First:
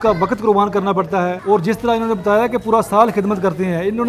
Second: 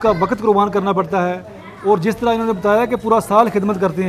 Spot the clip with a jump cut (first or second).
first